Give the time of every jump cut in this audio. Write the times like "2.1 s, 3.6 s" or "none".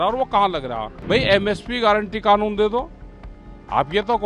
0.9 s